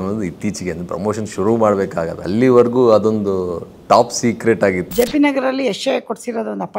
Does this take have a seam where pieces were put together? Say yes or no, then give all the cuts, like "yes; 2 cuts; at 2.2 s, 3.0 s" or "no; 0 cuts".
yes; 2 cuts; at 2.2 s, 4.9 s